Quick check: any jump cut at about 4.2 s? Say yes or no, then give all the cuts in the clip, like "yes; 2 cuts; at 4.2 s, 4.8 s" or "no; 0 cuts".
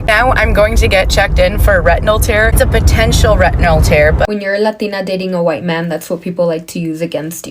yes; 1 cut; at 4.2 s